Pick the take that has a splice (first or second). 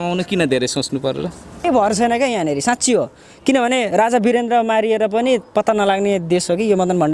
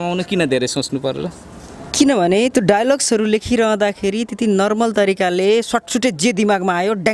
first